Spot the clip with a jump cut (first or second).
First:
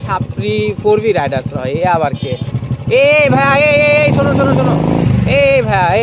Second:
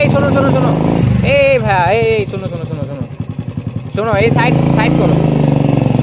first